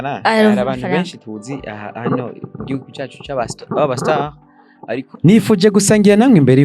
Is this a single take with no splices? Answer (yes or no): no